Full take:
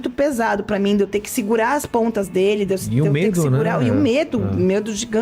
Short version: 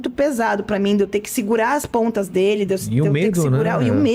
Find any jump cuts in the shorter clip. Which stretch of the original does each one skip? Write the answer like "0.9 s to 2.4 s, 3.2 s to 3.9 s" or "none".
none